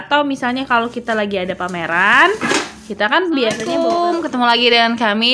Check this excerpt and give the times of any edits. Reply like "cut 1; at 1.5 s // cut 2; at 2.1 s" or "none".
cut 1; at 3.9 s

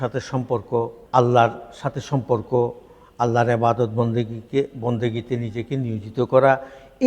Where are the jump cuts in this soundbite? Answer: cut 1; at 1.0 s

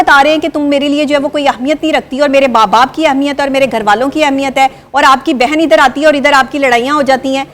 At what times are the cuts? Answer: none

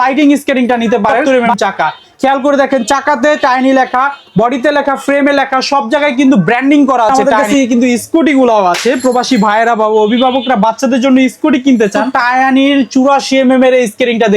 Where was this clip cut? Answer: cut 1; at 1.2 s // cut 2; at 7.1 s // cut 3; at 12.1 s

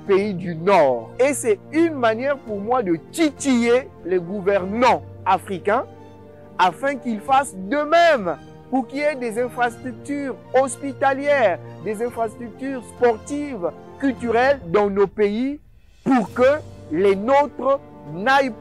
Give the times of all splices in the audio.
cut 1; at 1.1 s

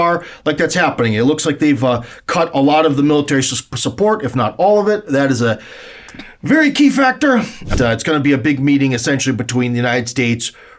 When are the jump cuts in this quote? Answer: cut 1; at 7.7 s

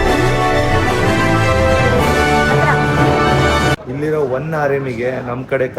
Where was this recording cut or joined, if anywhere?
cut 1; at 3.8 s

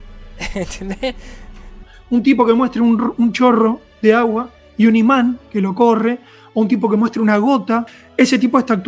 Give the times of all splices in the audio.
cut 1; at 1.9 s // cut 2; at 7.9 s

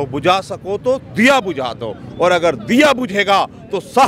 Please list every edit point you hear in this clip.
none

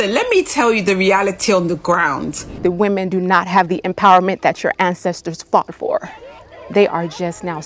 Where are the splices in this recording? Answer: cut 1; at 2.6 s

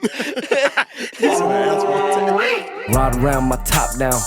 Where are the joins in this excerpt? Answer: cut 1; at 1.3 s

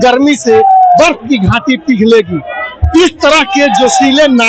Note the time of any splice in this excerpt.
none

